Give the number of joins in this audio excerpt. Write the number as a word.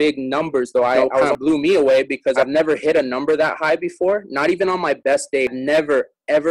three